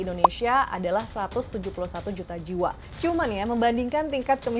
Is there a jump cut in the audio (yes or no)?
yes